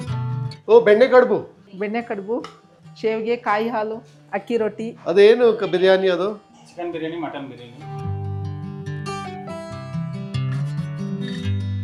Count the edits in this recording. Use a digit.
0